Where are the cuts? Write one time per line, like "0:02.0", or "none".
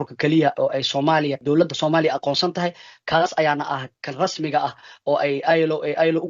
0:01.4